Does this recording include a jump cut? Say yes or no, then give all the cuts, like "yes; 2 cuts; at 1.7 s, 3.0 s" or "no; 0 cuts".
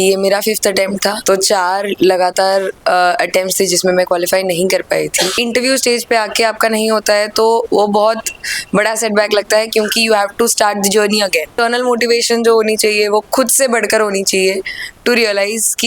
yes; 3 cuts; at 1.2 s, 5.4 s, 11.6 s